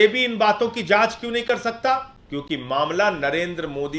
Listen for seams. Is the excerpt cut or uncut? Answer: cut